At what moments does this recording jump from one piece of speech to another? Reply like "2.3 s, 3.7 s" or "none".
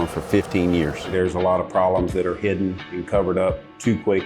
1.1 s